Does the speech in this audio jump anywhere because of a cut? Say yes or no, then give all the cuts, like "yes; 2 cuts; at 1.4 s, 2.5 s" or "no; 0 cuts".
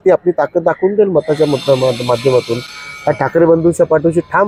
no; 0 cuts